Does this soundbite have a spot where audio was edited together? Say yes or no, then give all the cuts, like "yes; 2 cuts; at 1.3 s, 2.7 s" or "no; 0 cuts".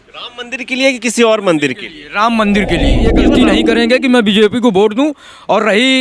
yes; 1 cut; at 3.3 s